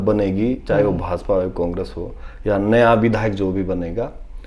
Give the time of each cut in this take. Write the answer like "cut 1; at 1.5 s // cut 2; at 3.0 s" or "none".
none

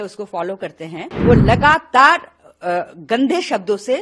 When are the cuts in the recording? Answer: cut 1; at 1.1 s

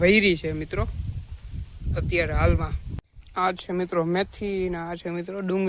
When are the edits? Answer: cut 1; at 3.2 s

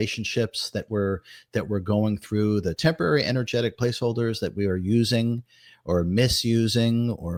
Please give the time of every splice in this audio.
none

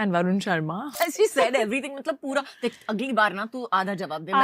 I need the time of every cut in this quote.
cut 1; at 0.9 s

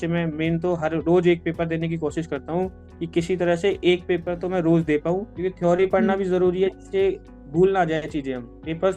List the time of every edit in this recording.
cut 1; at 5.3 s

